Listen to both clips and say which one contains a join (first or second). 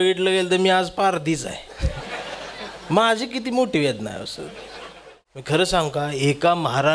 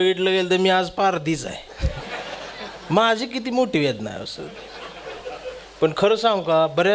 first